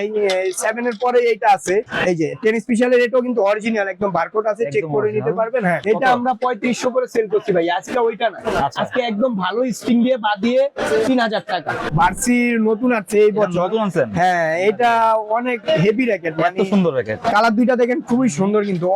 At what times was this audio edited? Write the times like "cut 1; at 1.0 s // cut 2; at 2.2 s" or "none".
cut 1; at 1.9 s // cut 2; at 5.8 s // cut 3; at 11.9 s

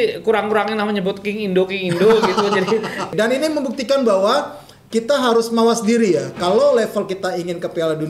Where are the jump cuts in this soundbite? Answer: cut 1; at 3.1 s

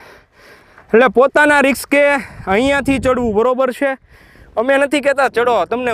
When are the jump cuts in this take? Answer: none

